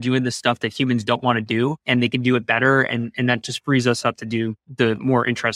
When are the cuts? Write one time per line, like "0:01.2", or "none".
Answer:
0:01.8
0:04.6

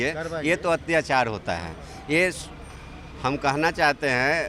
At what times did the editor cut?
none

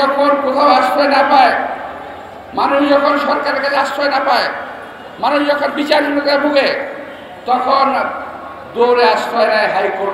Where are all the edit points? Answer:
none

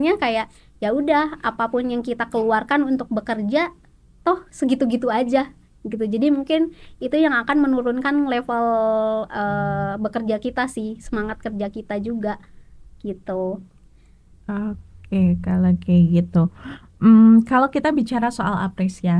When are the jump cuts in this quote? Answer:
none

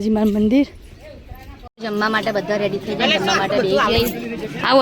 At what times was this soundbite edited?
0:01.7

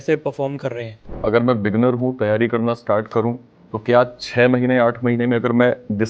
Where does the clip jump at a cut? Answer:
0:01.1

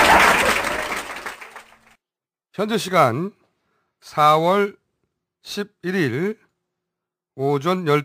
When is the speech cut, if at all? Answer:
0:02.4

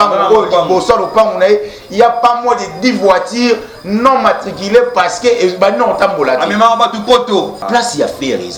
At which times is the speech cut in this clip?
0:07.6

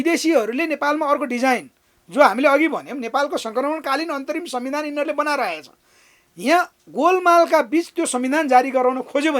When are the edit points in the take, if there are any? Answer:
none

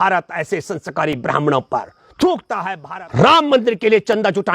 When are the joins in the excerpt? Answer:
0:02.7

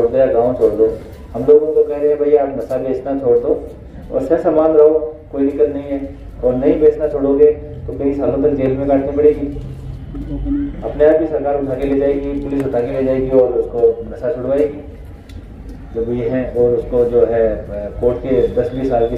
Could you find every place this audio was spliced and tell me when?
none

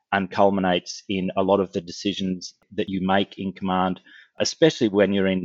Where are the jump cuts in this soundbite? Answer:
0:02.9

